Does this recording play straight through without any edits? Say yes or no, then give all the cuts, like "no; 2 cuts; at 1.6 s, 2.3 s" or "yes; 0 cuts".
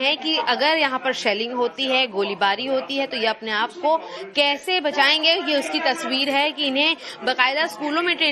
no; 1 cut; at 3.1 s